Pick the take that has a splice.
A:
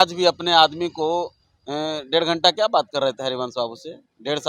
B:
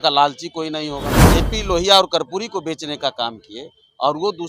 B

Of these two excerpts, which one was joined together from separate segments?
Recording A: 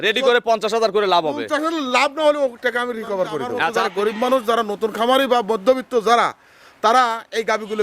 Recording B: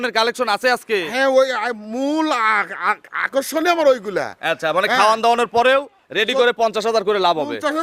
A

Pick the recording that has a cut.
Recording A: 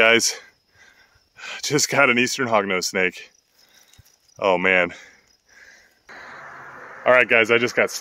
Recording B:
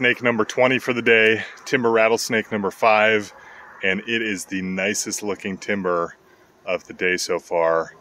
A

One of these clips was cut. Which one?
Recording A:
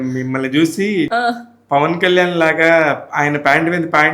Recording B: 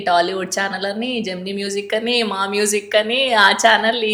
A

